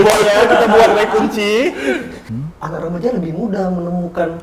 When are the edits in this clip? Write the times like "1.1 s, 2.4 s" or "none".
2.2 s